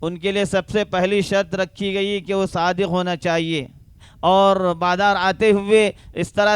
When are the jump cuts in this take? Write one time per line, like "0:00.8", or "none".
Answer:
0:04.1